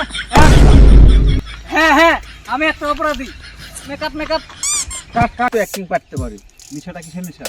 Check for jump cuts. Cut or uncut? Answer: cut